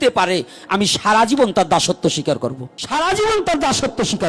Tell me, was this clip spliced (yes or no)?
yes